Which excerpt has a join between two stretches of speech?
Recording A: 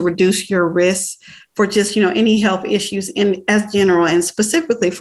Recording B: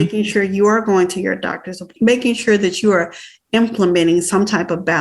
B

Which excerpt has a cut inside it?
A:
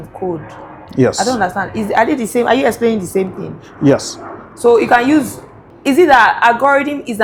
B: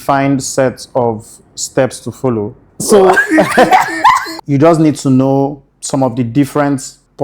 B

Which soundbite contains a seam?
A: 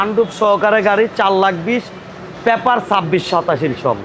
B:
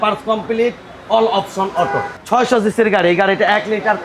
B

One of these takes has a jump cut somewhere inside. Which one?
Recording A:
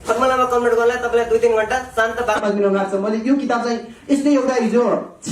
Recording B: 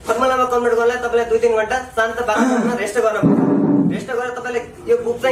A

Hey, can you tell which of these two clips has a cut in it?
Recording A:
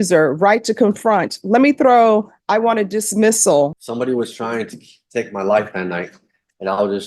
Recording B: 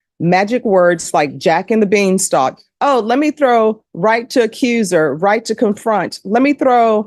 A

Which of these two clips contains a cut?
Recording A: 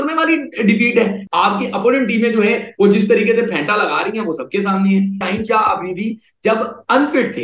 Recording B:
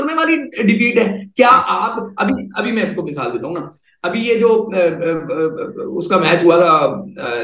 A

